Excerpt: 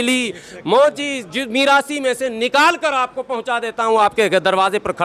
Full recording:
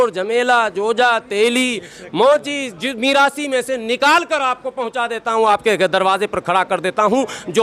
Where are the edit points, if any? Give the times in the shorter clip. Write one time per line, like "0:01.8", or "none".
none